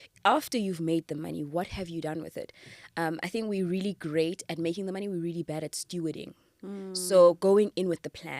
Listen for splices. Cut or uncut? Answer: uncut